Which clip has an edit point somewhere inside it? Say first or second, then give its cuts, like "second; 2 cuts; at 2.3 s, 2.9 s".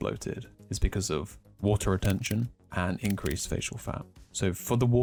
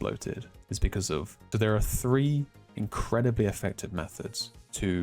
second; 1 cut; at 1.4 s